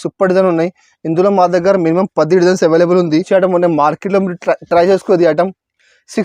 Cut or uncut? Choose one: cut